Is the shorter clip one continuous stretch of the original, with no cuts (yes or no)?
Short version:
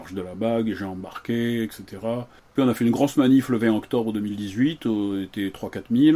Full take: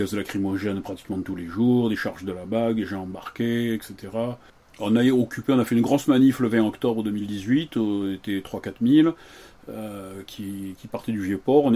no